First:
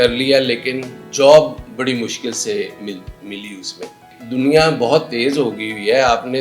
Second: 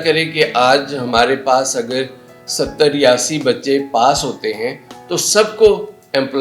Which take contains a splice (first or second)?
first